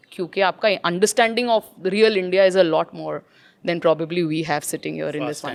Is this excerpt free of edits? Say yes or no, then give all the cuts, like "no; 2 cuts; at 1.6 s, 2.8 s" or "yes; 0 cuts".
yes; 0 cuts